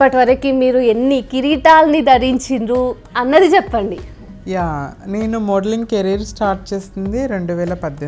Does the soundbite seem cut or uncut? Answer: uncut